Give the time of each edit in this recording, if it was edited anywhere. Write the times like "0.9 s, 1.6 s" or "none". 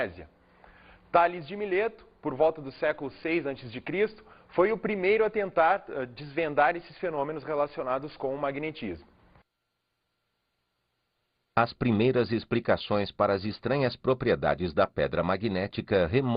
none